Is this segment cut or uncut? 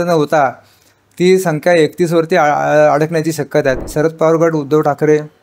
cut